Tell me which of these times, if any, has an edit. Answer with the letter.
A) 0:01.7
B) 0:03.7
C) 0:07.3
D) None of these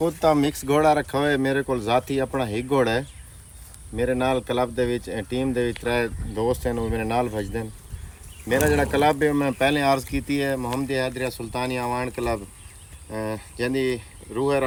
D